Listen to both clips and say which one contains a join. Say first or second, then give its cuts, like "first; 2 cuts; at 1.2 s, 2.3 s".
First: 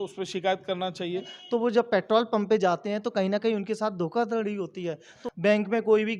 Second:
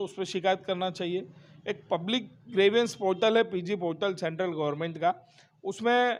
first; 2 cuts; at 1.3 s, 5.1 s